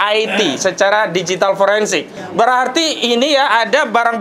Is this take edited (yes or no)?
yes